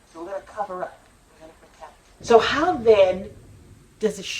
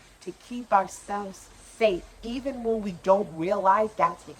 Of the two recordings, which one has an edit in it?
first; 1 cut; at 2.1 s

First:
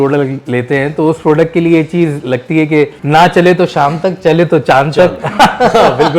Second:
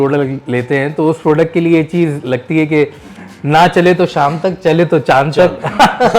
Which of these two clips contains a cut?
first; 1 cut; at 3.0 s

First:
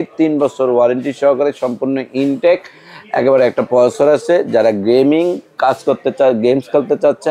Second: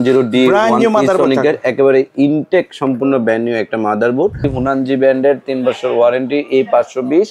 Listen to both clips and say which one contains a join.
second; 1 cut; at 4.5 s

